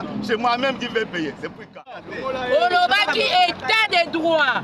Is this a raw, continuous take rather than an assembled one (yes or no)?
no